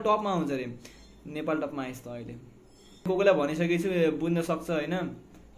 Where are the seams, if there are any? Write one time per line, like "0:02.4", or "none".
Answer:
0:03.1